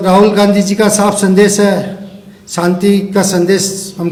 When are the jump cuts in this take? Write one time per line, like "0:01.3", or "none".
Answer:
none